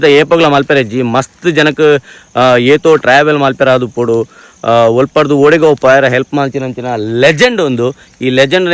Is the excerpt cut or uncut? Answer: uncut